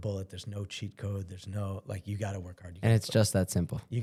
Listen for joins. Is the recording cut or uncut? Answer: uncut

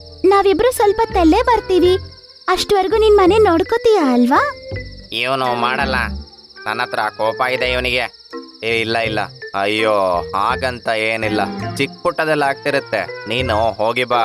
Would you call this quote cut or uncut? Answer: uncut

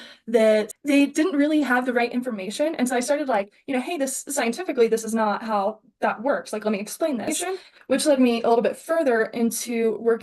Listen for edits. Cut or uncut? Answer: cut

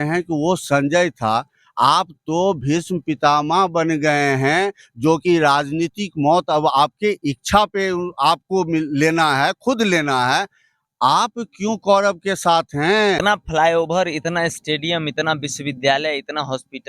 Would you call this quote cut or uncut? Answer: cut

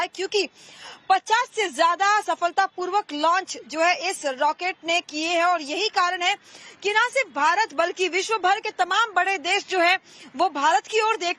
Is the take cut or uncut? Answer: cut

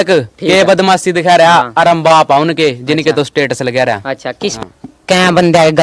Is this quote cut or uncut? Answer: cut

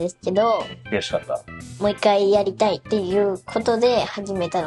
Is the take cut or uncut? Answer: cut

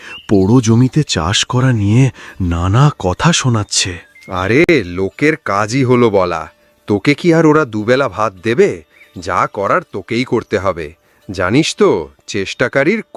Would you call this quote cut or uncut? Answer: uncut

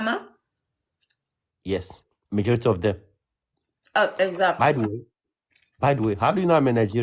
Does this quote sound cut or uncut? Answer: uncut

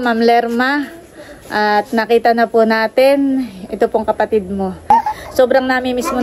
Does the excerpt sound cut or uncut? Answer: cut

